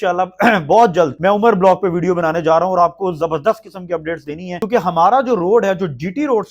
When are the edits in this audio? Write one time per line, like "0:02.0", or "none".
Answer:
0:04.6